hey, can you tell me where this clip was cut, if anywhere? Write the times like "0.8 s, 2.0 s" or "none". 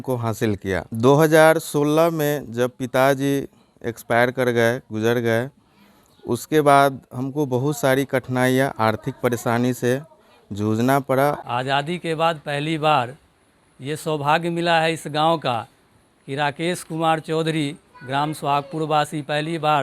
0.9 s, 11.4 s